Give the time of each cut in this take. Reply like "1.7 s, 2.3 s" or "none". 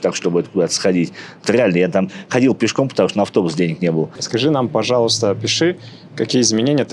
4.2 s